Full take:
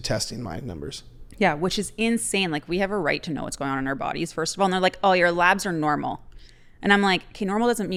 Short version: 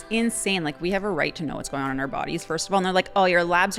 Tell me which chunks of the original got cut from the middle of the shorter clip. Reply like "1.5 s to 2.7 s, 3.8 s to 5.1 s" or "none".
none